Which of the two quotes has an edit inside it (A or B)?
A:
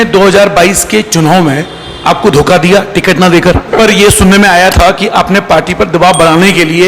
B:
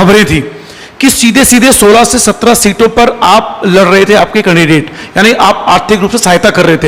A